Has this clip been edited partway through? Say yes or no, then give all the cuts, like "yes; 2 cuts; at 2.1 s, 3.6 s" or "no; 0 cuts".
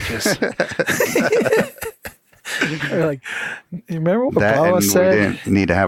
no; 0 cuts